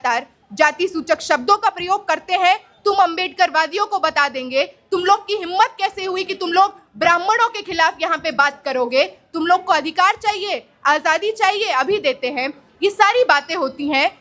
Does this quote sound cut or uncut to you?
uncut